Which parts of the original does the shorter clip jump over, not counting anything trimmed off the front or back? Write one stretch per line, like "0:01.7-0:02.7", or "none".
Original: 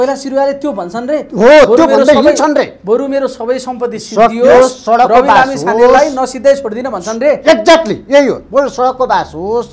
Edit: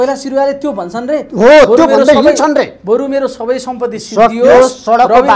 none